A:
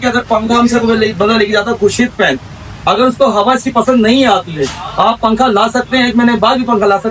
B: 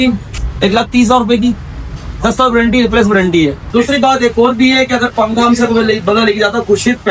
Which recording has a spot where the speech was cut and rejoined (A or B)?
B